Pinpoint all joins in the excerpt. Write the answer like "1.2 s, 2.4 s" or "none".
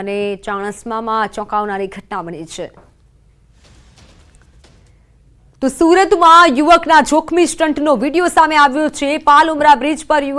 none